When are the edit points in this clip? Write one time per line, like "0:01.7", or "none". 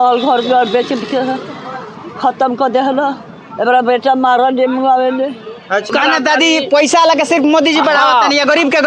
0:05.9